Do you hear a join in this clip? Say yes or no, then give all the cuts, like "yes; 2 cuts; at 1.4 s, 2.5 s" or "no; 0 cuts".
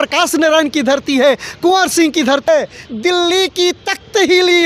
yes; 1 cut; at 2.5 s